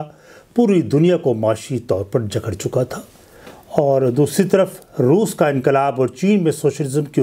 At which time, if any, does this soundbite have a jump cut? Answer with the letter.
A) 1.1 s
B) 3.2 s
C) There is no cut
C